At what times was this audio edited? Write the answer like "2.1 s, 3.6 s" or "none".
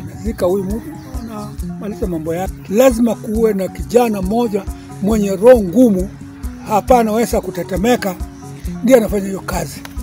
2.6 s

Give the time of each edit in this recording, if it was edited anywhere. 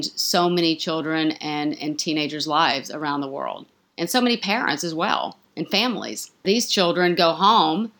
6.4 s

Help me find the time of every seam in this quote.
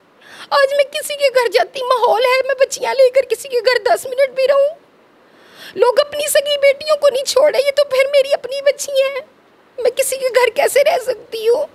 none

